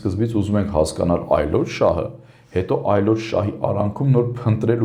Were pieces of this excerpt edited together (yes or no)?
no